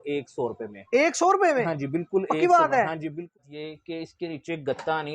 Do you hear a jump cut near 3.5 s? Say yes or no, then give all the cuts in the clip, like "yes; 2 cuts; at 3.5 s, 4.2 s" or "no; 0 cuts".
yes; 1 cut; at 3.5 s